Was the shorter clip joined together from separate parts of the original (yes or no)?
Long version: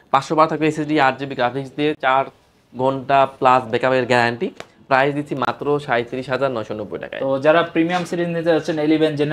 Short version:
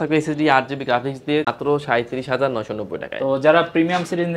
yes